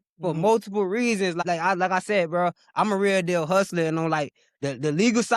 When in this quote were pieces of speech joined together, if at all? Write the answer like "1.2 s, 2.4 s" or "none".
1.4 s